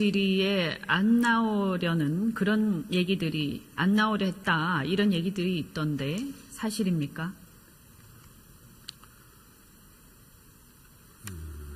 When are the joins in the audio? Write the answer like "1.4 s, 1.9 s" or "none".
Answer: 5.2 s